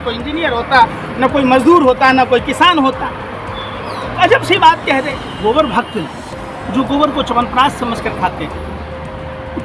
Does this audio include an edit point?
yes; 1 cut; at 5.2 s

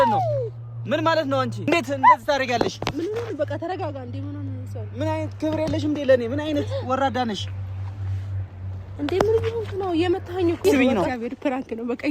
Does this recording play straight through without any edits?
no; 2 cuts; at 1.7 s, 10.6 s

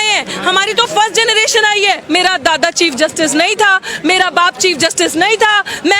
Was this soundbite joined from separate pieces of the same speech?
yes; 1 cut; at 2.0 s

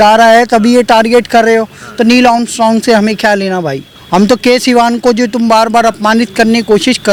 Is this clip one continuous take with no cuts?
yes; 0 cuts

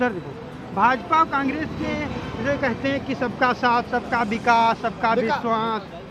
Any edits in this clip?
no; 0 cuts

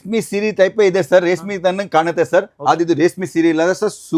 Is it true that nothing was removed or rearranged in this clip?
yes; 0 cuts

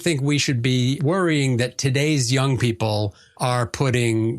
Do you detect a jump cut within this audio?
yes; 1 cut; at 3.2 s

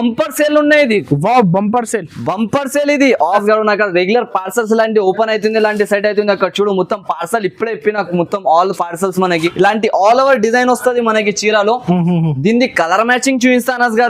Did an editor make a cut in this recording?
yes; 2 cuts; at 3.4 s, 9.5 s

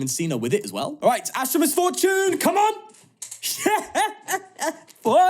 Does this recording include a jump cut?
yes; 1 cut; at 0.9 s

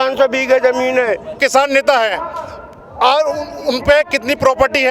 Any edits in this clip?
yes; 1 cut; at 1.4 s

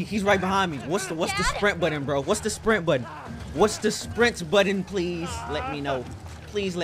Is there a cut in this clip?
no; 0 cuts

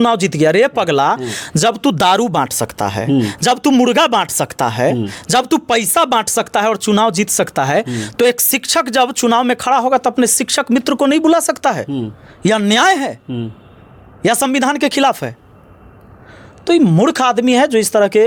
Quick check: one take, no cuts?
yes; 0 cuts

